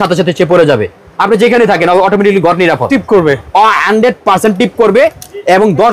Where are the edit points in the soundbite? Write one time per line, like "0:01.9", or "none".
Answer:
none